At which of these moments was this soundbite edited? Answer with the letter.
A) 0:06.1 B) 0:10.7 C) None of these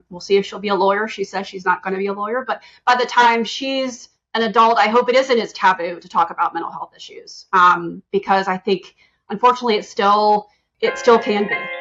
B